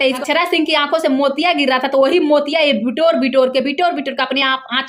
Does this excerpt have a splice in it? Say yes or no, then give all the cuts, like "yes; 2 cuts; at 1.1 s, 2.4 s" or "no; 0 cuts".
no; 0 cuts